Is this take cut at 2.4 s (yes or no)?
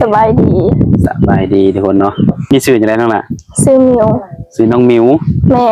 yes